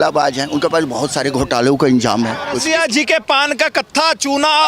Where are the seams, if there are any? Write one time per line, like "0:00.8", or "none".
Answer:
0:02.6